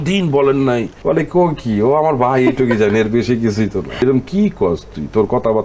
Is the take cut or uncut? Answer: cut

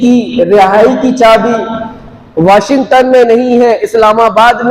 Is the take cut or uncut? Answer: uncut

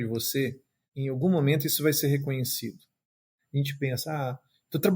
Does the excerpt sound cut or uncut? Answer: cut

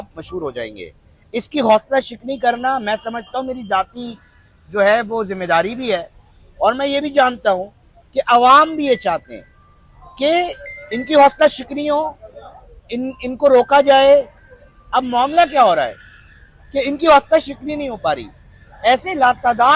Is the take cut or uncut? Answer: uncut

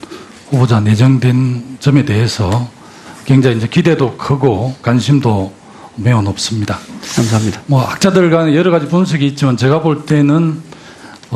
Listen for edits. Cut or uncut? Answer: cut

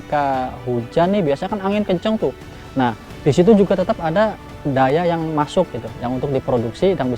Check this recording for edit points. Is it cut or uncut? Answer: cut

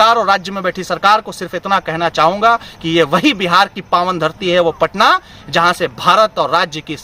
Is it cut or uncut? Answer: uncut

